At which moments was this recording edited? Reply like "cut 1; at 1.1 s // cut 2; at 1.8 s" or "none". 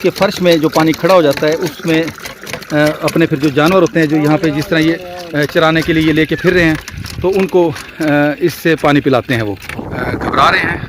cut 1; at 9.8 s